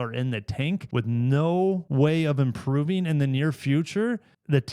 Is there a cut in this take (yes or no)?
yes